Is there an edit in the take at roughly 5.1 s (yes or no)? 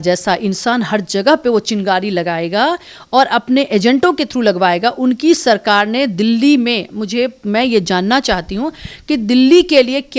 no